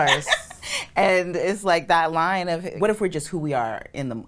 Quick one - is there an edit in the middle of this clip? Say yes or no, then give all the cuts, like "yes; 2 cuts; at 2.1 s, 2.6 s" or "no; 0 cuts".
yes; 1 cut; at 2.7 s